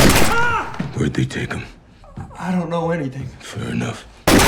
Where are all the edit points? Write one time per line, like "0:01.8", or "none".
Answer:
none